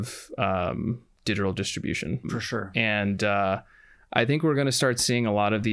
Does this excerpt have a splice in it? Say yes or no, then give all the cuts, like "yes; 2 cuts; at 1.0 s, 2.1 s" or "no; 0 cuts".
yes; 1 cut; at 2.2 s